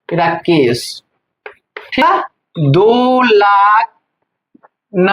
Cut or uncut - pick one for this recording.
cut